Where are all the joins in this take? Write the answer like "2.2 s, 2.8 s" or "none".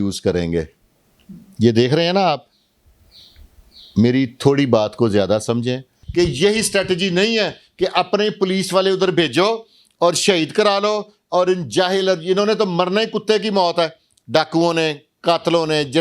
6.0 s